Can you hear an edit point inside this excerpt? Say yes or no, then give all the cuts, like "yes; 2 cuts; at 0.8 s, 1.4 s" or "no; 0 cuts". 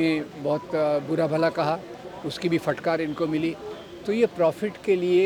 no; 0 cuts